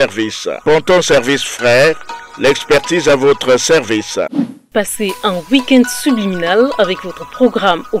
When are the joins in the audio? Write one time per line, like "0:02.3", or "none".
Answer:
0:04.7